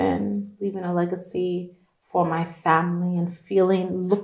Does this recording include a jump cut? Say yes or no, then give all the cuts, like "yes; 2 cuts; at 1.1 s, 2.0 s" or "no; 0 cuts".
no; 0 cuts